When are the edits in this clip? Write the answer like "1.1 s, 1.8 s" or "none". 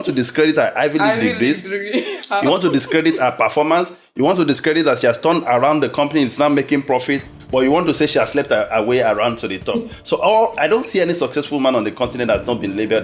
none